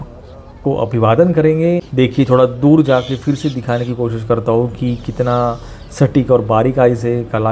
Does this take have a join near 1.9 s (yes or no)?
yes